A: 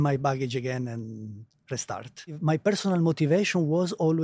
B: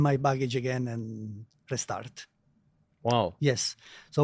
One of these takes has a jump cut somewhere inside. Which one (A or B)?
A